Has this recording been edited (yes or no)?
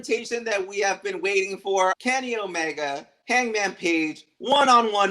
yes